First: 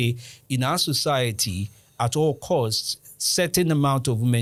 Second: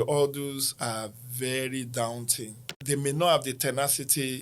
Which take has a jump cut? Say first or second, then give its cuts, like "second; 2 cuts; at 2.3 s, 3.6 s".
second; 1 cut; at 2.8 s